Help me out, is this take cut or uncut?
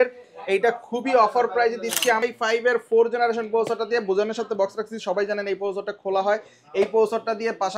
cut